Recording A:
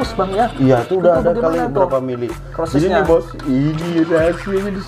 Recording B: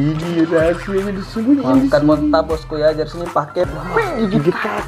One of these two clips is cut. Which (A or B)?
B